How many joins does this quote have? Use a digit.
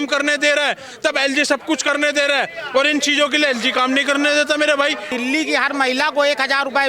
1